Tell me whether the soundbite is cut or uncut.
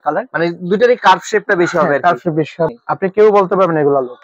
cut